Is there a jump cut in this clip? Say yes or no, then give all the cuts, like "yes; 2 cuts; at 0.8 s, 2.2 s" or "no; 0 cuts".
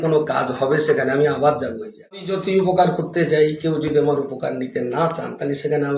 yes; 1 cut; at 2.4 s